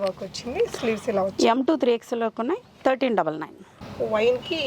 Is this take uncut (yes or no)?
yes